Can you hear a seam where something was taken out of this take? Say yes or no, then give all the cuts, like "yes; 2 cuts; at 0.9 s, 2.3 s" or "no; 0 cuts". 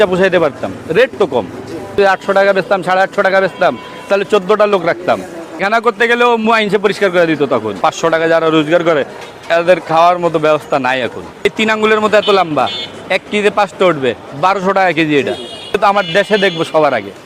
yes; 5 cuts; at 2.0 s, 5.6 s, 7.8 s, 11.4 s, 15.8 s